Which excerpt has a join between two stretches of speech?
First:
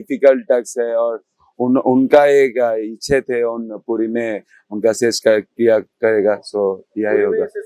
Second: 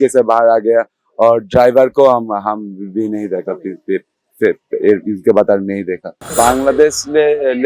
second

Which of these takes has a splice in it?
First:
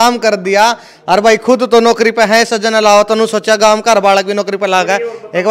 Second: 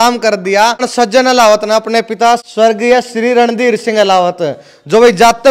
second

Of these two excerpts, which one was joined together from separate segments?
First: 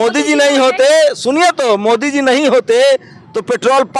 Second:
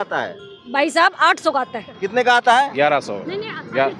second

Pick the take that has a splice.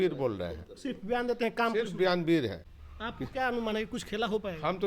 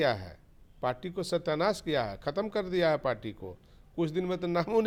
first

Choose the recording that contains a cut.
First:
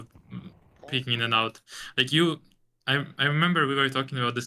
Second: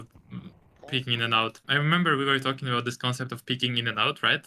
second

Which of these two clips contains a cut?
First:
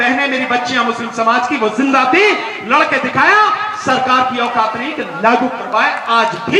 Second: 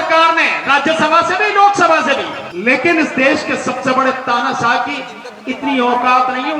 second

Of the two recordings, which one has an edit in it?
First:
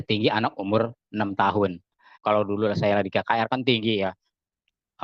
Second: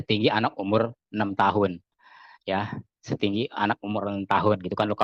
first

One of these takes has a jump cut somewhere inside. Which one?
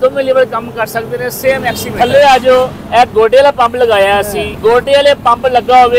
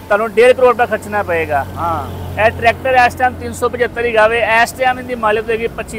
first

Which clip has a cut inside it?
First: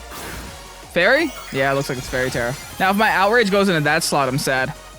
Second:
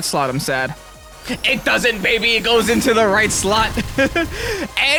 first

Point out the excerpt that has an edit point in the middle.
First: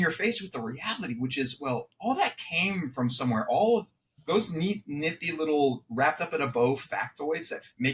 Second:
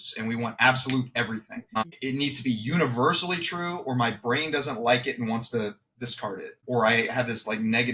second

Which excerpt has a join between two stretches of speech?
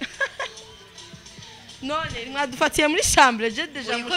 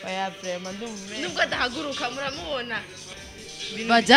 second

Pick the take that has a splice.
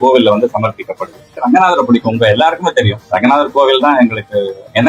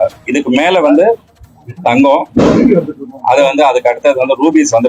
first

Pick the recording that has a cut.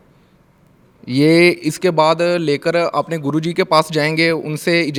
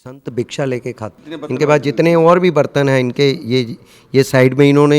second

